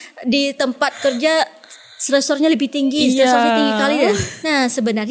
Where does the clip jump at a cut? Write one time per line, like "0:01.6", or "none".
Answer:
none